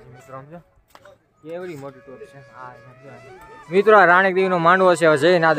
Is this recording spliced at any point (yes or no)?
yes